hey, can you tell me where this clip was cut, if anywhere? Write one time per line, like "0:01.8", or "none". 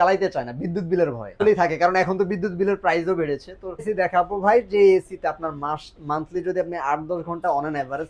0:01.4
0:03.9